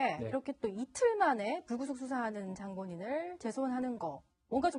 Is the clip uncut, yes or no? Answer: yes